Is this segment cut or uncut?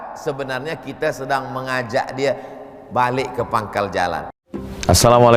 cut